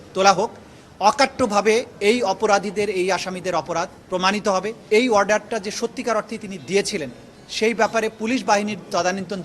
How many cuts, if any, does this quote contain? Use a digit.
1